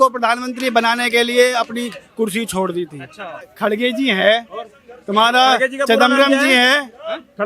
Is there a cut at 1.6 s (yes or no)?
no